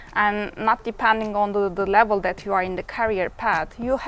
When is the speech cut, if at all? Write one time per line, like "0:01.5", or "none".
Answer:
none